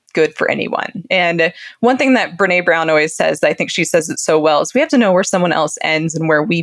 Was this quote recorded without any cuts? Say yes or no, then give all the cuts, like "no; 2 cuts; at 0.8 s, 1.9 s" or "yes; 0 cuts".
yes; 0 cuts